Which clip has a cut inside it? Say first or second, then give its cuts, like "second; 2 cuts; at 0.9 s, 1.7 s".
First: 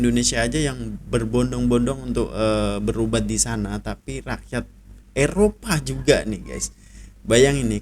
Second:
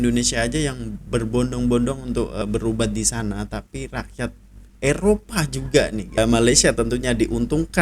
second; 2 cuts; at 2.4 s, 6.2 s